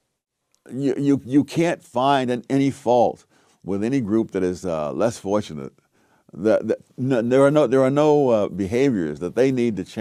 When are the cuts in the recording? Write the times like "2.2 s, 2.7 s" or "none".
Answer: none